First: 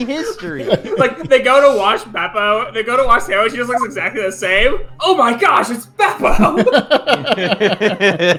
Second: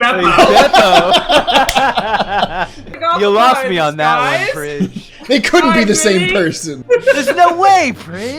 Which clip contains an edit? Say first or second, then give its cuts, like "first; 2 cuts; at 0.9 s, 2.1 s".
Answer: second; 2 cuts; at 2.9 s, 6.7 s